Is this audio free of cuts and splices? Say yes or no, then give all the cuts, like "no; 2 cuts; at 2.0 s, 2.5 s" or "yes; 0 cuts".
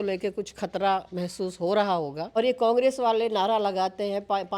no; 1 cut; at 2.3 s